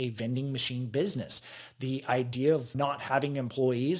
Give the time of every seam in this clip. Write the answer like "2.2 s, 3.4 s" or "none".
2.7 s